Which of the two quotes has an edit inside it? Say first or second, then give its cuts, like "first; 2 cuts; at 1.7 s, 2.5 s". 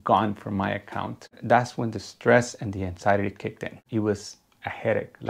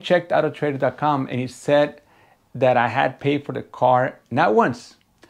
first; 2 cuts; at 1.4 s, 3.8 s